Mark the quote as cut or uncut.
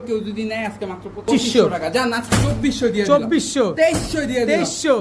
cut